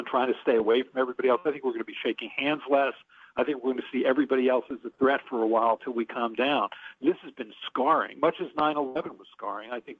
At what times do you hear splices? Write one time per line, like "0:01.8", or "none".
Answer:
none